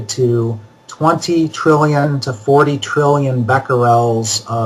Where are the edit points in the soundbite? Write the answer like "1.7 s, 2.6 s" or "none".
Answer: none